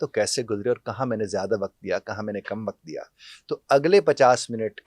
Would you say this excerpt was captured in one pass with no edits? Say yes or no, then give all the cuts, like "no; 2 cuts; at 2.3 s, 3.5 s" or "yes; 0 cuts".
yes; 0 cuts